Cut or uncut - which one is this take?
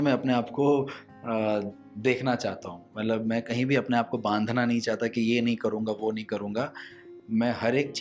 uncut